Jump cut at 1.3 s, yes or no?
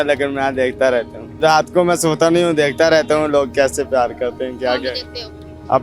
yes